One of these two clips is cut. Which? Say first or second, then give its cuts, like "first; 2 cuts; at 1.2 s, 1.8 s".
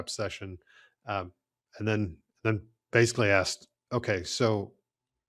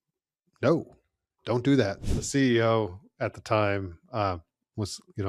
second; 1 cut; at 2.1 s